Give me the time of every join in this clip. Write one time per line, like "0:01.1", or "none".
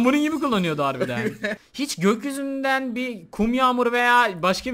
0:01.6